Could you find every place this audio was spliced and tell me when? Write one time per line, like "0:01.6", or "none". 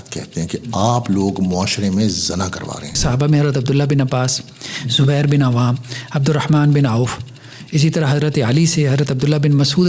0:03.0

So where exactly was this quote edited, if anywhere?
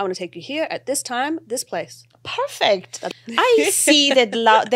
0:03.0

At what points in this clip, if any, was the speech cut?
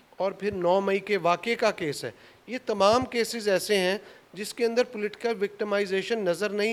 none

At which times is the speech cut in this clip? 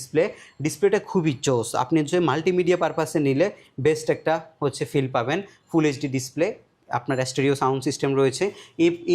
none

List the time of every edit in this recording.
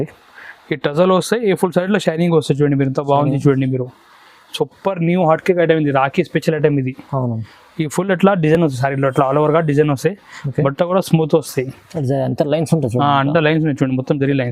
none

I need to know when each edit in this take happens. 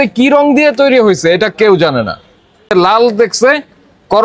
0:02.7

